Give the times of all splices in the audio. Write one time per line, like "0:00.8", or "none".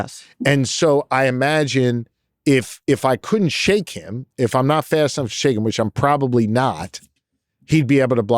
none

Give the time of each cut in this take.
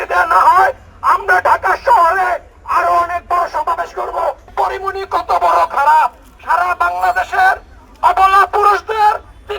0:04.4

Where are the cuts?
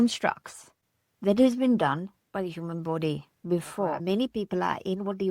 0:04.0

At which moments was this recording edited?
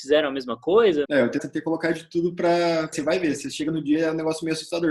0:01.4
0:02.9

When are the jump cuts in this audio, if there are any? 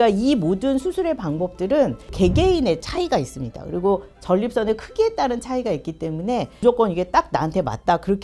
0:02.1
0:06.6

